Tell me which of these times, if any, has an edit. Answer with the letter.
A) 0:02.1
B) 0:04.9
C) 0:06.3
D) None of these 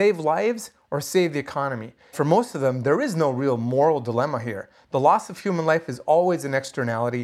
A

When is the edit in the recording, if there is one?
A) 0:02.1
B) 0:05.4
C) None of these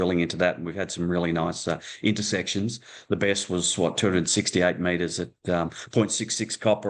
C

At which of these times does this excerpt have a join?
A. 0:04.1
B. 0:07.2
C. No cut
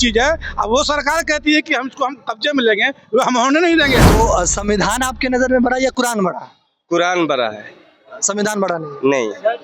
A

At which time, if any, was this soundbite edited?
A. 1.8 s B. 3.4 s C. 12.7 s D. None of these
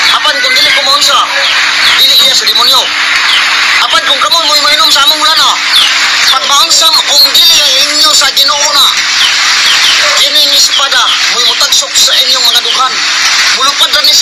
D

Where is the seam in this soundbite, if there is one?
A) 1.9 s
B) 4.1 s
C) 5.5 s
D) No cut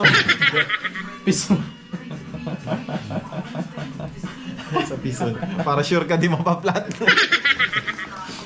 D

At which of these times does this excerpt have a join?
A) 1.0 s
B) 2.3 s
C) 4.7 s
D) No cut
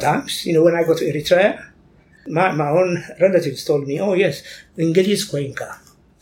B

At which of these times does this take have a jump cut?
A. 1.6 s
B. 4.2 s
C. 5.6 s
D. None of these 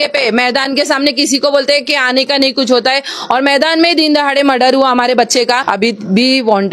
C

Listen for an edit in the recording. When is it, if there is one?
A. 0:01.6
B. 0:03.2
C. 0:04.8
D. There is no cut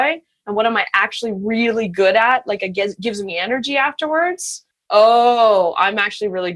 C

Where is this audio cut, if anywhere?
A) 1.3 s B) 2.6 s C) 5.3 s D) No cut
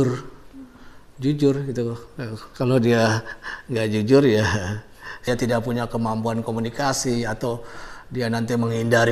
C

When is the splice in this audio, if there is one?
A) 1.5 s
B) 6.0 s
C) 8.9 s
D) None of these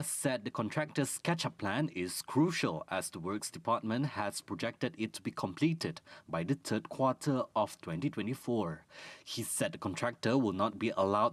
D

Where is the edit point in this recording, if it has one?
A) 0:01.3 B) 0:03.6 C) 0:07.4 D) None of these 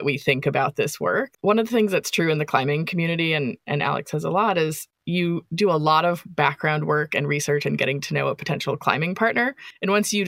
A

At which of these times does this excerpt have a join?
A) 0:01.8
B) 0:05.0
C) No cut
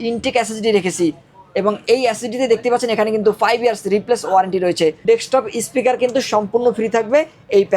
B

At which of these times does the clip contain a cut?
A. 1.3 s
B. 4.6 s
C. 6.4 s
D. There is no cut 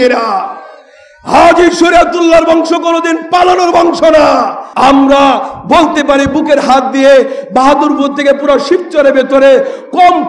B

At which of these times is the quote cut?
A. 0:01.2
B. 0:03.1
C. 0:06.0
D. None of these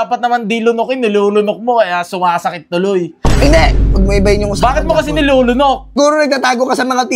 C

